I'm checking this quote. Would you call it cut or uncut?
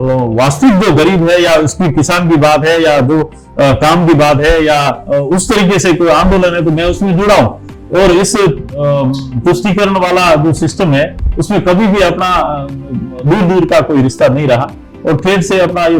uncut